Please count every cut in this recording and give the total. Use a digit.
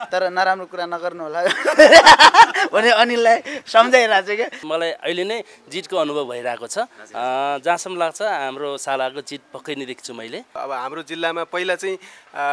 2